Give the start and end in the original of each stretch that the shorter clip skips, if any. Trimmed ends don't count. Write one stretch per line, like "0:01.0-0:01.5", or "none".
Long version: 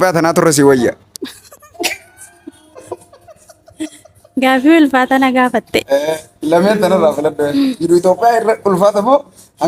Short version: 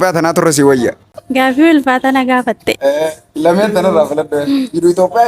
0:01.1-0:04.2